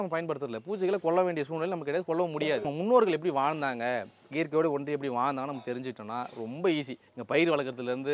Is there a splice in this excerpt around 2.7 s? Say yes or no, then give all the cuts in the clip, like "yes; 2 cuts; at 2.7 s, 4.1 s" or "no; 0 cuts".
yes; 1 cut; at 2.7 s